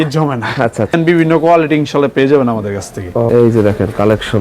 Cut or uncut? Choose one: cut